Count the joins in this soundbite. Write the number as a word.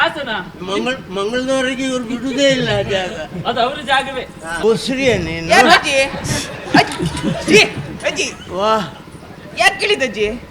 one